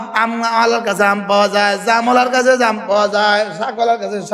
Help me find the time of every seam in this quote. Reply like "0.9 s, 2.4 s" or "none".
none